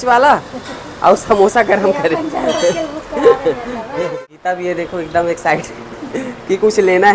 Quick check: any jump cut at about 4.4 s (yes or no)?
yes